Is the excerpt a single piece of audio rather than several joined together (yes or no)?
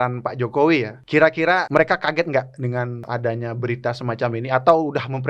no